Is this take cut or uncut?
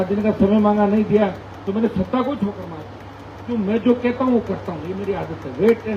uncut